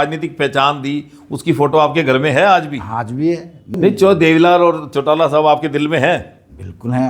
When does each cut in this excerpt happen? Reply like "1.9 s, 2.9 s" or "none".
3.7 s